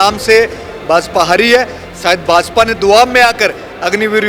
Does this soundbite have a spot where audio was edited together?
no; 0 cuts

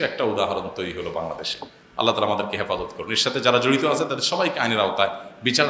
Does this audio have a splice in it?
no; 0 cuts

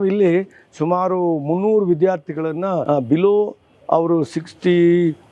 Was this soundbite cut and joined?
yes; 1 cut; at 2.8 s

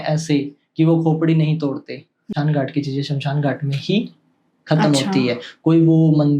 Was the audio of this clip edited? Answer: yes; 1 cut; at 2.3 s

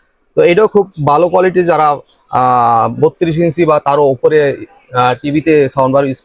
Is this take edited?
no; 0 cuts

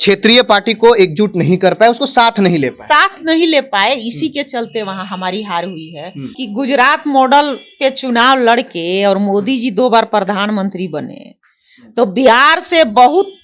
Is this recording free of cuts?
no; 1 cut; at 6.4 s

